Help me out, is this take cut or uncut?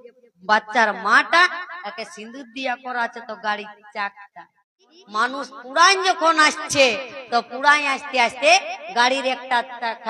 cut